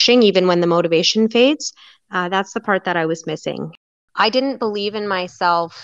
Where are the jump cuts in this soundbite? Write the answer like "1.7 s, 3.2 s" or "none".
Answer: 3.7 s